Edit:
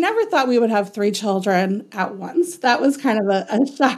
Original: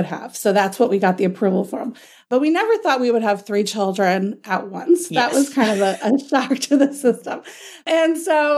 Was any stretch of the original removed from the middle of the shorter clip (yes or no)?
no